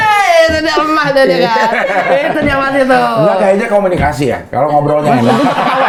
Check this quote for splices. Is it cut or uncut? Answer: uncut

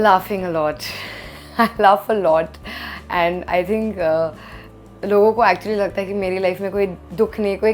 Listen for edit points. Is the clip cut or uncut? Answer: uncut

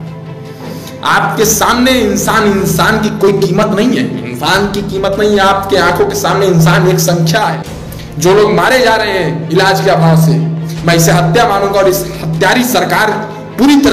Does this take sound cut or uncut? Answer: cut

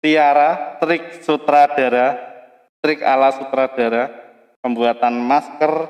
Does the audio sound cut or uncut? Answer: uncut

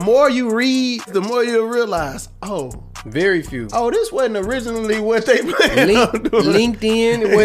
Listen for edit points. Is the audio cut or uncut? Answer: cut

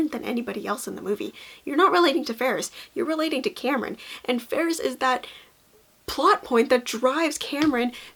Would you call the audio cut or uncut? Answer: uncut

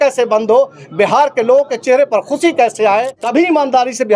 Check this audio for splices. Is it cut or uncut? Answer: cut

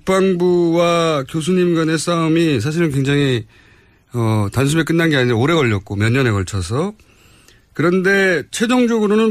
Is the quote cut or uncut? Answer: cut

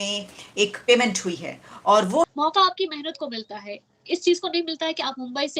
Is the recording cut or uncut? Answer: cut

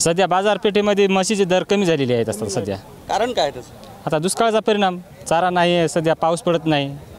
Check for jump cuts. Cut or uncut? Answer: uncut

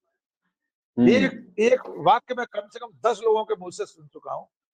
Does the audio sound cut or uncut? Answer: uncut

